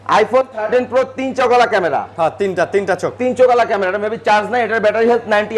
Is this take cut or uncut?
uncut